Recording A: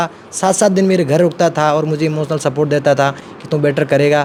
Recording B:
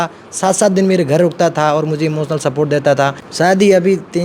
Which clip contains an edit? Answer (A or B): B